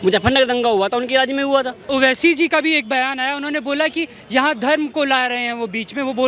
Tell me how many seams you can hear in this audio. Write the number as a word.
one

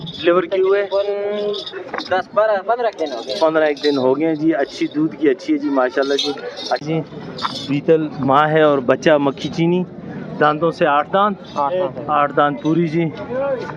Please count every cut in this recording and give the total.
one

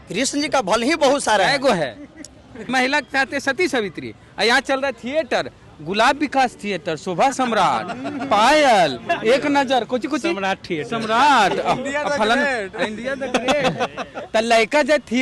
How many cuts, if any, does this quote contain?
one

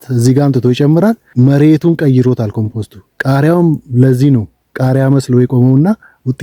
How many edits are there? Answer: one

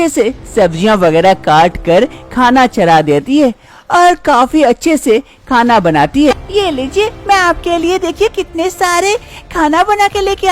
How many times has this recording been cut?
one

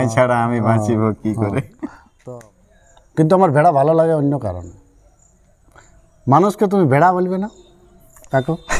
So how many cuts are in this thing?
one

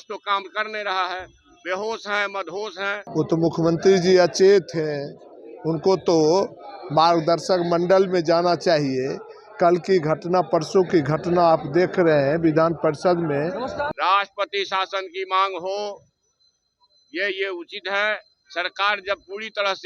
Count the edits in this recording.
two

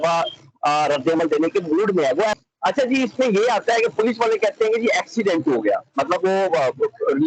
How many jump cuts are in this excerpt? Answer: one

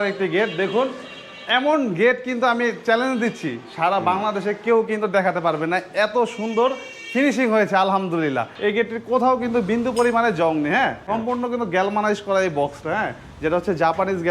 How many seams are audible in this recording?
two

